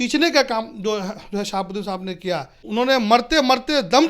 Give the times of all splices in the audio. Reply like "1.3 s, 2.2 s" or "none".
2.6 s